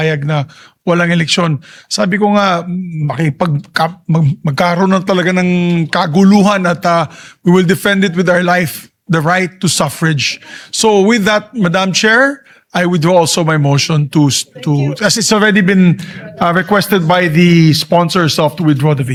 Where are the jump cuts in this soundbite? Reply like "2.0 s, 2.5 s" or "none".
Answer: none